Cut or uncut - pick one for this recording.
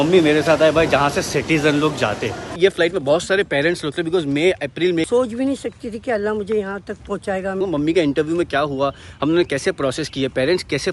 cut